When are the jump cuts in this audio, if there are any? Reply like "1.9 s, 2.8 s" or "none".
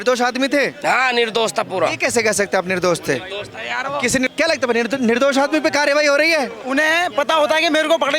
4.3 s